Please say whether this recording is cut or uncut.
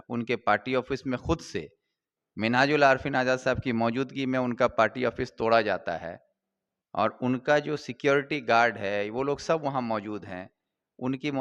uncut